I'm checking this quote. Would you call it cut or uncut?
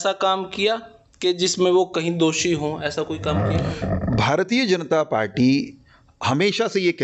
uncut